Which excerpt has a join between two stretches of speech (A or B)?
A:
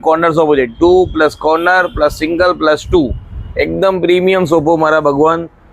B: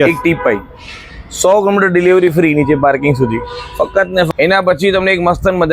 B